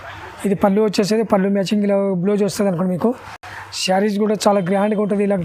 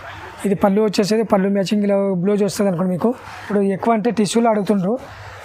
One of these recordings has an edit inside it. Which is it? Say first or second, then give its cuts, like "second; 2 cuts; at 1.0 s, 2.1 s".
second; 1 cut; at 3.5 s